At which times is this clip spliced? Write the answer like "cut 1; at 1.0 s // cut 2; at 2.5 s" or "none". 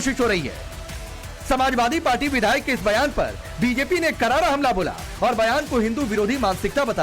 cut 1; at 2.2 s